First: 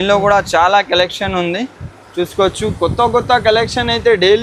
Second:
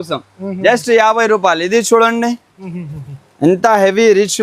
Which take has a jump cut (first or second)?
second